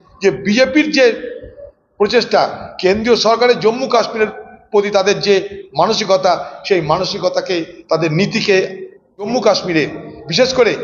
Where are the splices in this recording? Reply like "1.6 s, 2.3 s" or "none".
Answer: 9.3 s